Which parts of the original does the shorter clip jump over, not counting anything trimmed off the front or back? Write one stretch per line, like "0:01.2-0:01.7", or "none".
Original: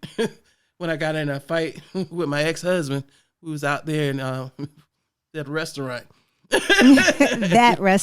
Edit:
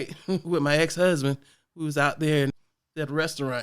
0:04.2-0:04.9